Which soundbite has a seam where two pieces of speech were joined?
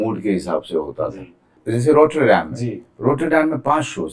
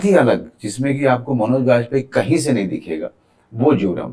first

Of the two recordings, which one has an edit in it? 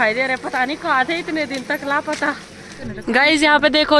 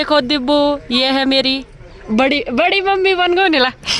first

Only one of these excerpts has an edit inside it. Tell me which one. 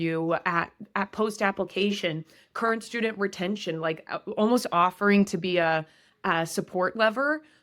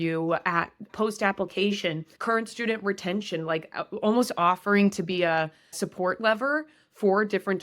second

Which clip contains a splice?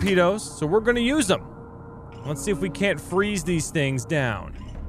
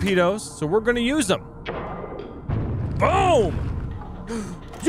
second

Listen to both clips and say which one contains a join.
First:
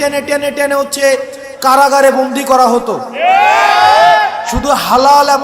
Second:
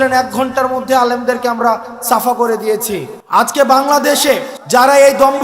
second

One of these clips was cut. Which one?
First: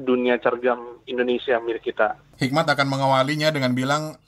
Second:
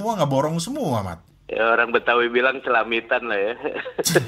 first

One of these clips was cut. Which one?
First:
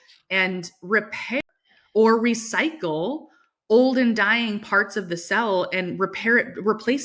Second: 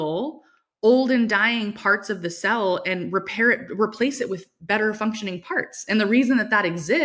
first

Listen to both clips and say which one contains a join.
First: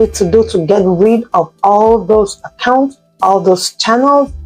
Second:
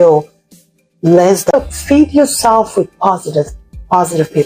second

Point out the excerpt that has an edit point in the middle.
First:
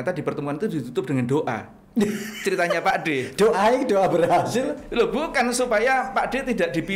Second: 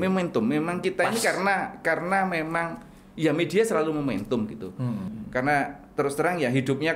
second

